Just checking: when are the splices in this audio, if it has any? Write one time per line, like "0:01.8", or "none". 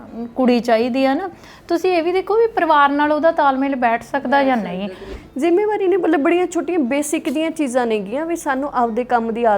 0:05.1

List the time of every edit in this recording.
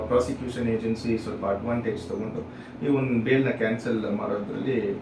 none

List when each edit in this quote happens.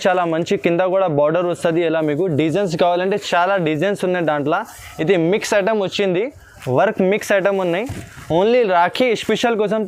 none

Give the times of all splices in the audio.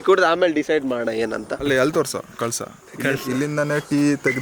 0:01.5

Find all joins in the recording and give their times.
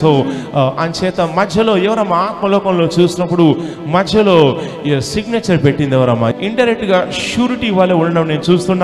0:06.3

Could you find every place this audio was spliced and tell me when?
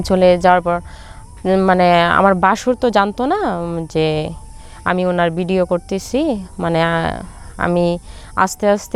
none

